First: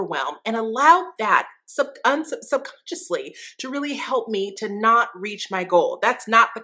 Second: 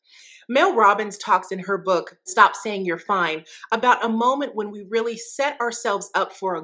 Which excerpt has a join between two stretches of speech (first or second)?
second